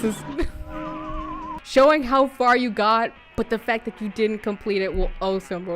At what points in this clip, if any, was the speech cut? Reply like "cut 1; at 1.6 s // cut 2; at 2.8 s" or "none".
cut 1; at 1.6 s